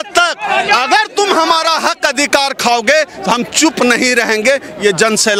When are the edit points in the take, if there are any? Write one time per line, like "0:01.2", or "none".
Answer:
none